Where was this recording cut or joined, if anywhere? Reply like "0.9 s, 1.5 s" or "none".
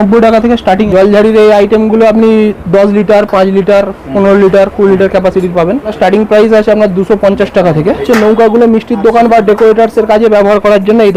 0.8 s, 5.9 s, 8.0 s